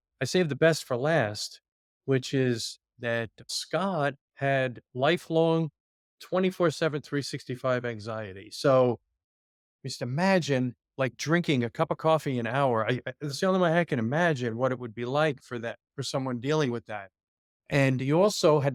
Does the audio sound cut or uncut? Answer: uncut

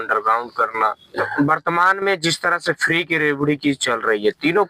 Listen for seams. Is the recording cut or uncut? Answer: cut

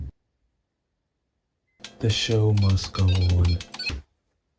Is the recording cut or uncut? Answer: cut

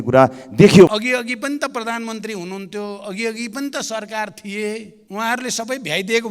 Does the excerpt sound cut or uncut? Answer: cut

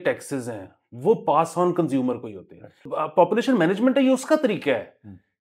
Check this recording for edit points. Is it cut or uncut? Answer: cut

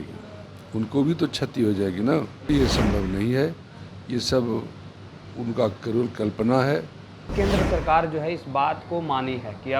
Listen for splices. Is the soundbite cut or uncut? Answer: cut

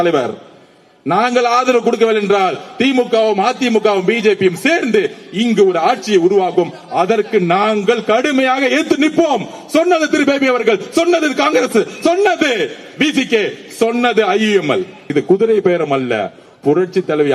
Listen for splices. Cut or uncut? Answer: cut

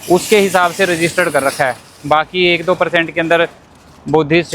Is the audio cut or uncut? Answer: uncut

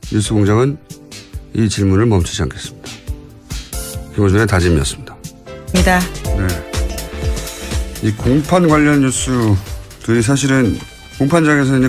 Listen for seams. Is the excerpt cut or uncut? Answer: cut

